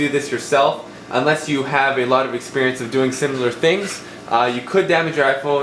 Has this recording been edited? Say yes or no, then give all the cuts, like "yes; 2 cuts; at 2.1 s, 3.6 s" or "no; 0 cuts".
yes; 1 cut; at 2.4 s